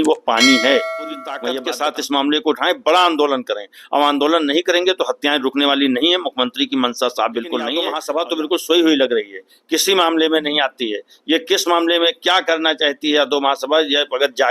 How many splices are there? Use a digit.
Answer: 2